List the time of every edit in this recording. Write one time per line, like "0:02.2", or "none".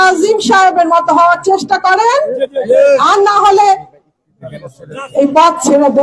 none